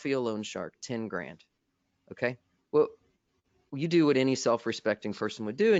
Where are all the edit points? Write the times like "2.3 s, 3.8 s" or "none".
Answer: none